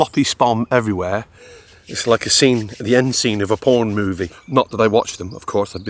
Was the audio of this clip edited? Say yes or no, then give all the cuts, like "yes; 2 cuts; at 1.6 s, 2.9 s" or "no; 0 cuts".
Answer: yes; 1 cut; at 4.3 s